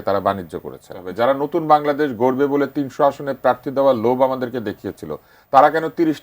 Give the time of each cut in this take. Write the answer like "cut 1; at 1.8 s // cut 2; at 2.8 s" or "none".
cut 1; at 1.0 s